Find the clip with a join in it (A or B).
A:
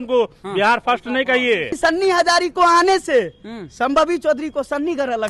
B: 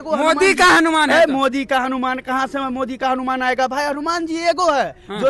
A